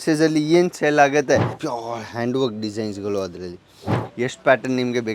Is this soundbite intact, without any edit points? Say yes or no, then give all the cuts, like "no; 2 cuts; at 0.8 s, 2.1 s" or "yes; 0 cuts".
no; 2 cuts; at 1.6 s, 4.0 s